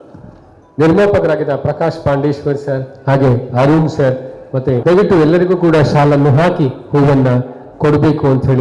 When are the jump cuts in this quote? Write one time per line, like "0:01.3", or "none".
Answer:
0:04.8